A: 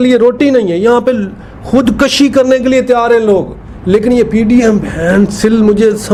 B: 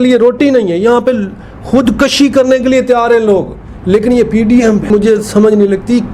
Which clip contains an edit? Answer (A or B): B